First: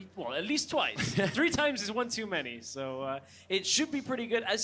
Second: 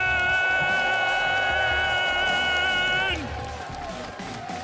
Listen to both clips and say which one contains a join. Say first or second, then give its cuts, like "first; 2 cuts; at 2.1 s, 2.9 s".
first; 1 cut; at 3.2 s